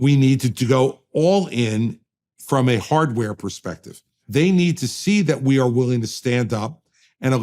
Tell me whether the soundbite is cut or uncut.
cut